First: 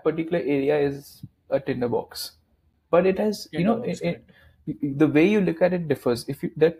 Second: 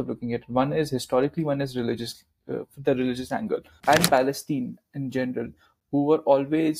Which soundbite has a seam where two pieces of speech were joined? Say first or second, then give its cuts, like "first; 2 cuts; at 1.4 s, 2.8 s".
second; 1 cut; at 3.7 s